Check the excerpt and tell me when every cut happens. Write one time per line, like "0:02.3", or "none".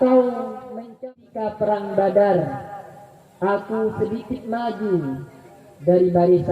0:01.0

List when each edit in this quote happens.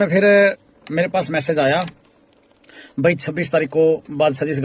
none

